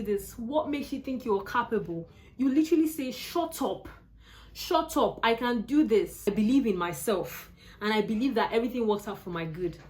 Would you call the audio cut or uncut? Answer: cut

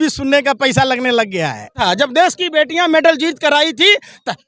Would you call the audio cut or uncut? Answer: cut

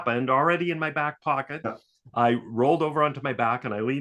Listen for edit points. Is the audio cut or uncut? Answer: uncut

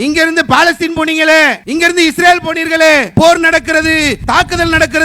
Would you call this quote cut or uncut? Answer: cut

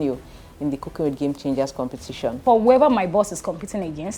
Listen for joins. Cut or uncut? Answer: cut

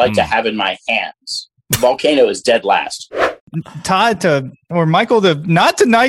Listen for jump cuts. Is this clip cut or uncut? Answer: cut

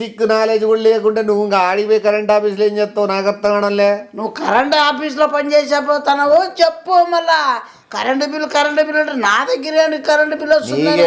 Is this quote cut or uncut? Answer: uncut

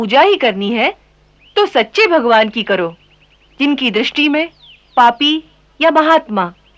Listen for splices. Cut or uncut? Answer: uncut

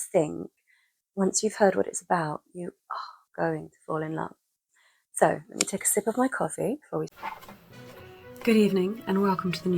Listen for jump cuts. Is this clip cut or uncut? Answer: cut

